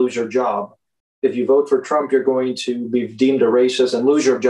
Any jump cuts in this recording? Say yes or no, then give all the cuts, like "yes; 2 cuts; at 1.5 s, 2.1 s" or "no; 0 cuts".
no; 0 cuts